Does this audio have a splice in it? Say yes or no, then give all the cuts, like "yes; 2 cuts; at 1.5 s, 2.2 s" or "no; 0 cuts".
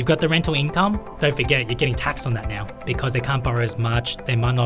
yes; 2 cuts; at 1.1 s, 2.7 s